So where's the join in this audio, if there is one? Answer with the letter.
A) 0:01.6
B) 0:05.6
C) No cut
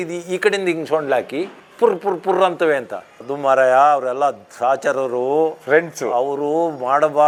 C